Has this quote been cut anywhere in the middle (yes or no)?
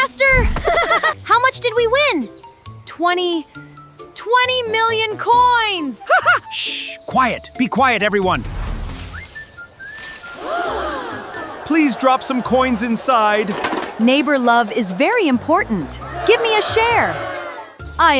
no